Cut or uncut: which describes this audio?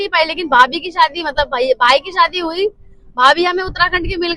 uncut